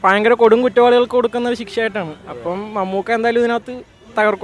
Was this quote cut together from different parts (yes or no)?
no